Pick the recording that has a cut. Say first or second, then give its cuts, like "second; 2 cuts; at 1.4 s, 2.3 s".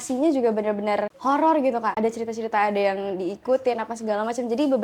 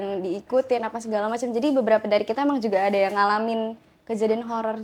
first; 2 cuts; at 1.1 s, 1.9 s